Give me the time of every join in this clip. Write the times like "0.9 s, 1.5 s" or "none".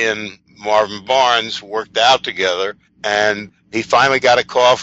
3.7 s

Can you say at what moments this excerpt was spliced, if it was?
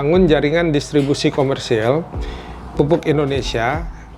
none

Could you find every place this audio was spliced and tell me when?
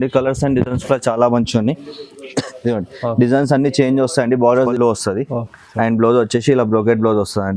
4.7 s

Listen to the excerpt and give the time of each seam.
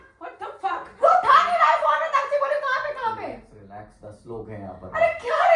none

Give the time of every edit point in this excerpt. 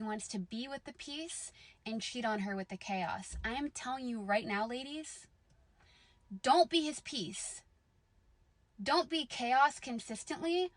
3.4 s

